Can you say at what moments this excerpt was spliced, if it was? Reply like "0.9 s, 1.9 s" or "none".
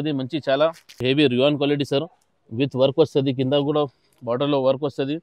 1.0 s